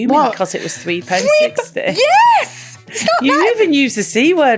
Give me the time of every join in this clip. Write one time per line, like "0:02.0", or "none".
none